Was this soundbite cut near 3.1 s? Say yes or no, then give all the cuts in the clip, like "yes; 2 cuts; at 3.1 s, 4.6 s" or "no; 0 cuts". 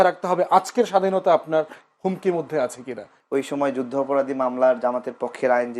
yes; 1 cut; at 3.1 s